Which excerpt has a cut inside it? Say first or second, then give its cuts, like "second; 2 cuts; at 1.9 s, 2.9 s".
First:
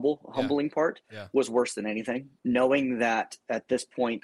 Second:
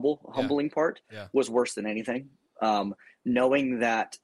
first; 1 cut; at 2.3 s